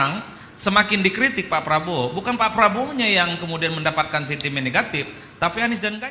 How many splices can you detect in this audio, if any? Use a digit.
0